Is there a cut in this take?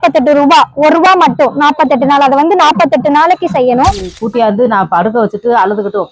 yes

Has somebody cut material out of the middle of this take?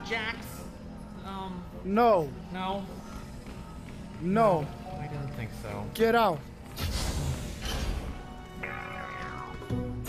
no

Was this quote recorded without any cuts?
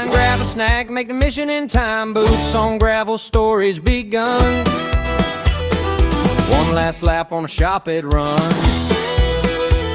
yes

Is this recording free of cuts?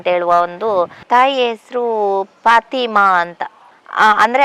no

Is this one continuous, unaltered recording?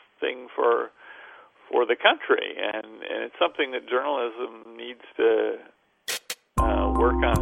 yes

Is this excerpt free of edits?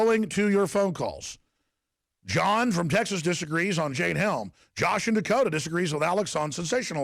yes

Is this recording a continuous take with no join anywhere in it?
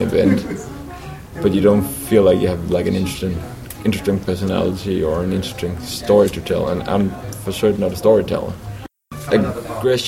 no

